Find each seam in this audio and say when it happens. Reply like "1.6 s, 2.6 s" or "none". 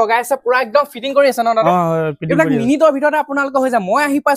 none